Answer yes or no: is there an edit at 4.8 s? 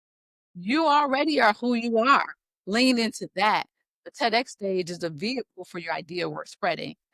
no